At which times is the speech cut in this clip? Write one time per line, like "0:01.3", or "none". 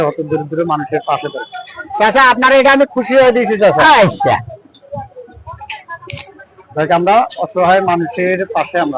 0:05.0